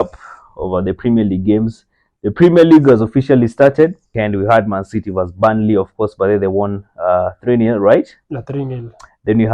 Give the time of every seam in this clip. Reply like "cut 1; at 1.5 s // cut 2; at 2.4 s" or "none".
cut 1; at 4.1 s